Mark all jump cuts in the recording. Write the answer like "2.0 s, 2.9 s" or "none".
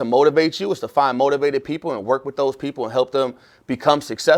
none